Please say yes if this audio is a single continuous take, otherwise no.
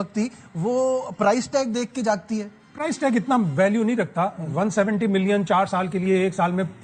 yes